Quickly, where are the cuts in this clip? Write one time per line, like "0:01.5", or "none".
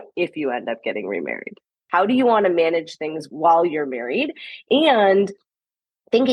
0:01.8
0:03.3